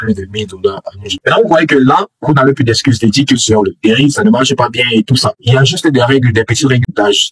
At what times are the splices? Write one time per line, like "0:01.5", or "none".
0:01.1

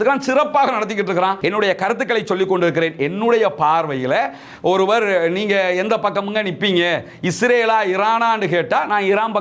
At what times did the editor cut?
0:01.4

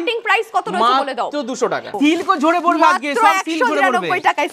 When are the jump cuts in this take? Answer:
0:01.9

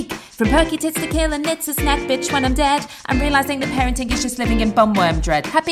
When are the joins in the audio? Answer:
none

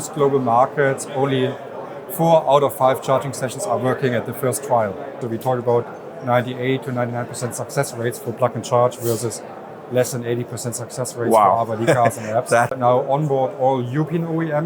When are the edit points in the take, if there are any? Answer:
0:05.2
0:12.8

